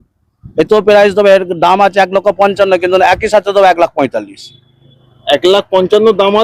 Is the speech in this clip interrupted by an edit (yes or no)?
no